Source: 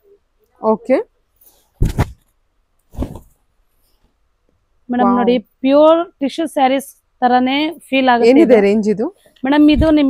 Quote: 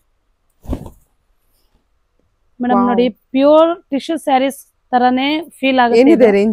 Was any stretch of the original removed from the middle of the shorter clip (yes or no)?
no